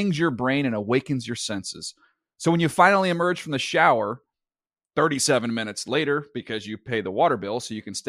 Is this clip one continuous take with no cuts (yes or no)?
yes